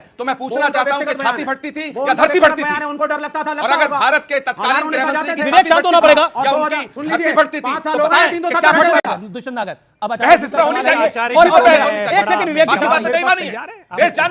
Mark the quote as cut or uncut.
uncut